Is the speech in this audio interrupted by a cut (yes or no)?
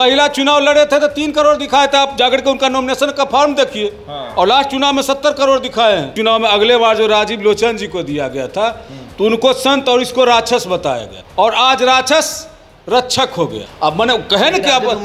yes